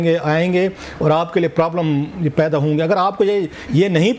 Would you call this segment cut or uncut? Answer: uncut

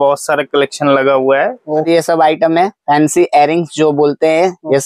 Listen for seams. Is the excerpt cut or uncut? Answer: cut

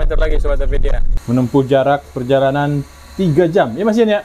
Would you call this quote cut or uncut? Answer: cut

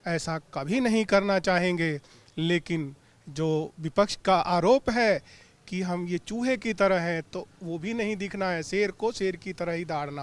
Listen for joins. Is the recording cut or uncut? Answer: uncut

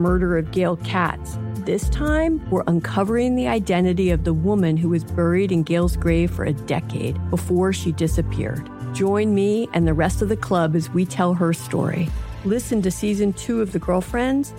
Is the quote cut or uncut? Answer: uncut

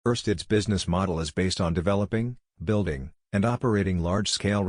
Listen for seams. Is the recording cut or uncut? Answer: cut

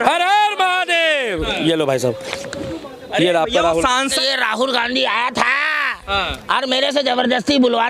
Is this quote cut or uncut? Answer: cut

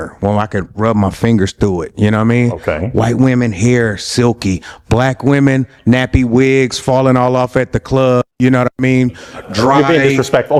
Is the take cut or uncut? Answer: uncut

